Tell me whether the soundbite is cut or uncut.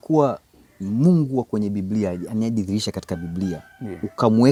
uncut